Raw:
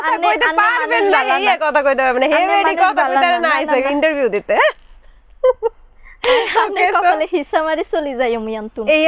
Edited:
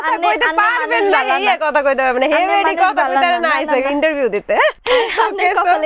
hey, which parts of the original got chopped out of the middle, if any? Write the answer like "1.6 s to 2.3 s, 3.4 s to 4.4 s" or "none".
4.8 s to 6.2 s